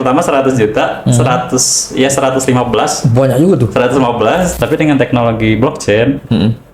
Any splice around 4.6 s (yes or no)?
yes